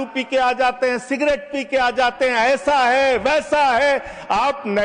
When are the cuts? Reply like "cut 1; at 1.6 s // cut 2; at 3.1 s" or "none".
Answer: none